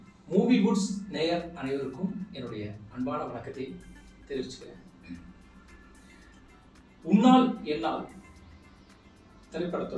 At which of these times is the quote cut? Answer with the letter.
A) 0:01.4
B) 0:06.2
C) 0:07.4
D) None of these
D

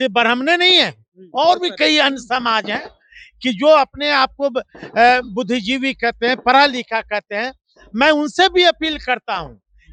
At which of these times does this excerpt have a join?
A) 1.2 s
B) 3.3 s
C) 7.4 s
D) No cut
D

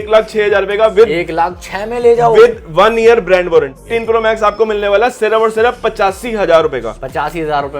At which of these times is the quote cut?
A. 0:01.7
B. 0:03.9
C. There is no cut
B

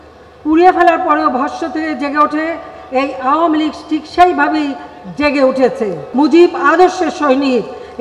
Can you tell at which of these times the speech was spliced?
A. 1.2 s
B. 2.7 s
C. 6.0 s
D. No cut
C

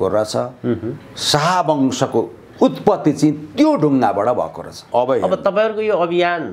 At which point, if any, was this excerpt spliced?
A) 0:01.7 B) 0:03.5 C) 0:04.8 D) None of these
C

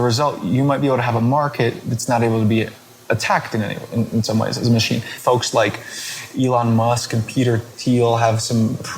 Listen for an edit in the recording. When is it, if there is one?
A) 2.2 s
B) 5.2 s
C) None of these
B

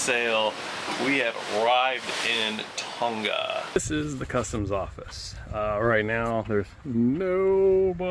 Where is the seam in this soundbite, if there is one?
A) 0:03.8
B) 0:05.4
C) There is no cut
A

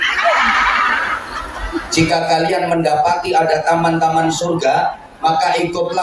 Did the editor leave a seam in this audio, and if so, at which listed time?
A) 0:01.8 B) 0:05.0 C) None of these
A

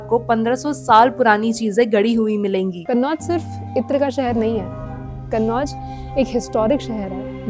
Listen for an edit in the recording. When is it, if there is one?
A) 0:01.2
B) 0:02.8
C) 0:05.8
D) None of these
B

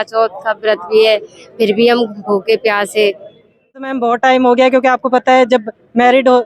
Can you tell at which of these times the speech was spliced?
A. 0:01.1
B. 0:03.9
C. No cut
B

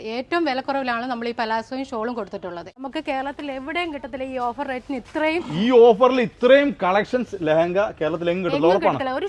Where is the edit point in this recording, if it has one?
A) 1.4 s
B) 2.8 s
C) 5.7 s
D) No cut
B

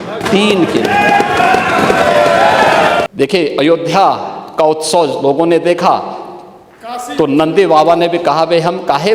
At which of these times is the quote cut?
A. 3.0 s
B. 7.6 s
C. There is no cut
A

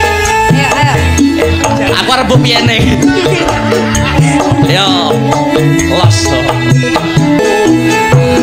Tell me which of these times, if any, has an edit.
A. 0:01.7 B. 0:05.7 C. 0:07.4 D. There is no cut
C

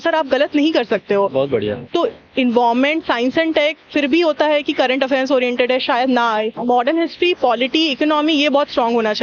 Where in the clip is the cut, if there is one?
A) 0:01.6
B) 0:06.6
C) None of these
B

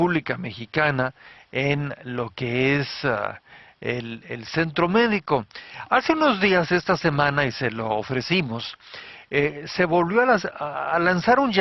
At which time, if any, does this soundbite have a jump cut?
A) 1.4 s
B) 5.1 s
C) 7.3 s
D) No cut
D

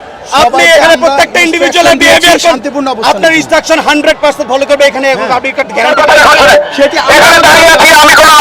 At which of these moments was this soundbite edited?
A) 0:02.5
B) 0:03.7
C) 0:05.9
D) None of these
C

